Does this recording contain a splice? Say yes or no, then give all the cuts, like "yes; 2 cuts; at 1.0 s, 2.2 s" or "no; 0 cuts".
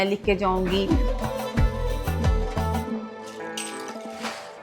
yes; 1 cut; at 1.0 s